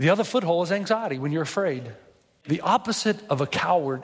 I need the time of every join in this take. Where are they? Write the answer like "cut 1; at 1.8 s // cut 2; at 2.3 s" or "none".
cut 1; at 2.4 s

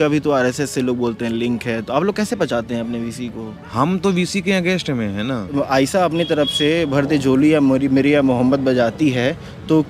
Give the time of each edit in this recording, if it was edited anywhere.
cut 1; at 3.6 s // cut 2; at 5.5 s

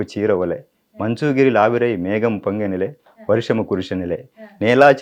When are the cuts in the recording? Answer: none

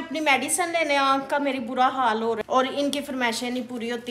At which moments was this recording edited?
cut 1; at 2.4 s

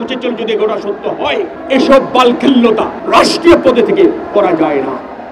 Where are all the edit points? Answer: cut 1; at 1.6 s // cut 2; at 3.0 s

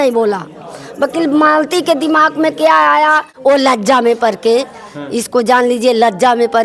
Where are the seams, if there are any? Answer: cut 1; at 3.3 s

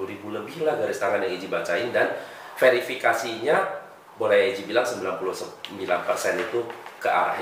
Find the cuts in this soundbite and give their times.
none

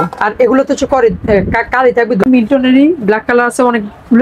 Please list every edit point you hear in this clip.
cut 1; at 2.2 s

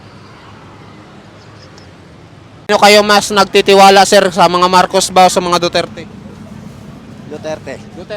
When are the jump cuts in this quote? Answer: cut 1; at 2.7 s

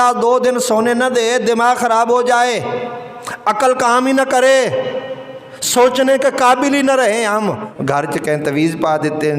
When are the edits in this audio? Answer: cut 1; at 7.7 s

